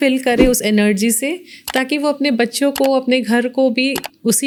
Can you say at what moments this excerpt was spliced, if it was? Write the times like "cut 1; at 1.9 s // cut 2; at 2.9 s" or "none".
none